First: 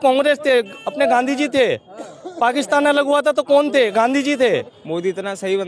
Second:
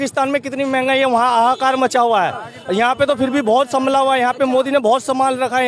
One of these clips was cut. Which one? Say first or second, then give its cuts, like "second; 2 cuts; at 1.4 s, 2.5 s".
first; 1 cut; at 4.6 s